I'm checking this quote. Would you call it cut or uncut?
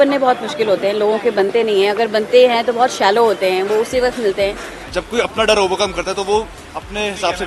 cut